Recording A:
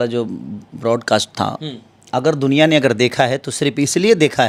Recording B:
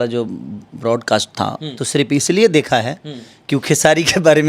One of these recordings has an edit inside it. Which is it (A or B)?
B